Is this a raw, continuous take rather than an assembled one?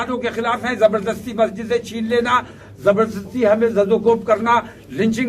yes; 0 cuts

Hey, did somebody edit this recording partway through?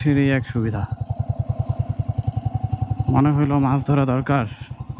no; 0 cuts

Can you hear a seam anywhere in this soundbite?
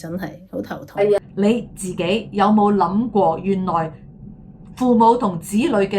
yes; 1 cut; at 1.2 s

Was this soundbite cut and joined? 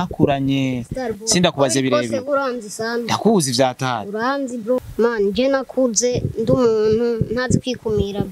yes; 1 cut; at 4.8 s

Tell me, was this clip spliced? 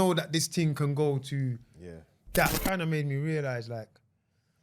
yes; 1 cut; at 2.5 s

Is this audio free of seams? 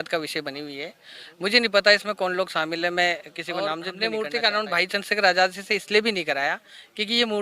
no; 1 cut; at 3.9 s

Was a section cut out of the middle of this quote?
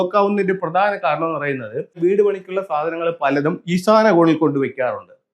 yes; 1 cut; at 2.0 s

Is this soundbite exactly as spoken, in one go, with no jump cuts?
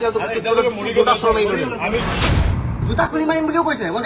no; 1 cut; at 2.3 s

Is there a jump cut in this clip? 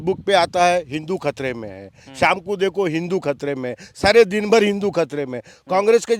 no; 0 cuts

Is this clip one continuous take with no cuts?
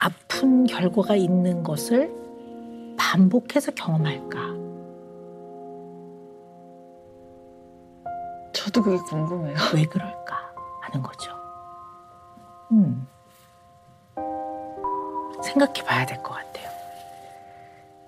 yes; 0 cuts

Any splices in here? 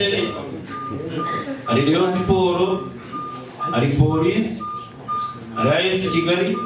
no; 0 cuts

